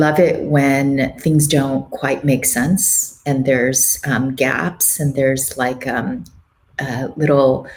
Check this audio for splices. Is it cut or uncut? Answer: uncut